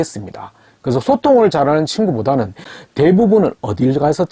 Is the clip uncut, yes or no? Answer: no